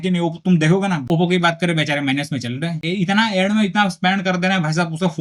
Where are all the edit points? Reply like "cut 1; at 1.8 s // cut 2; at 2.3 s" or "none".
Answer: cut 1; at 2.8 s